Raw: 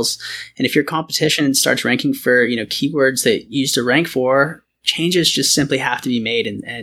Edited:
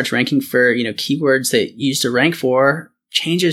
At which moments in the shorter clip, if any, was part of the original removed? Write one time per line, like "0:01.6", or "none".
none